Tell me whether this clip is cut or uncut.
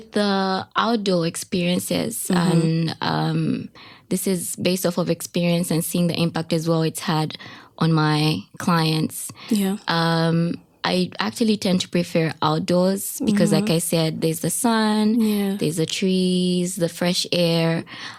uncut